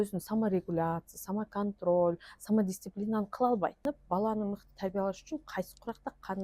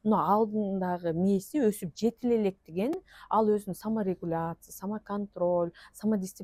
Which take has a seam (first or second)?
first